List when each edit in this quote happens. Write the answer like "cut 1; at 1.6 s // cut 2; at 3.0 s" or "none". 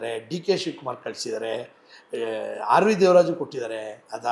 none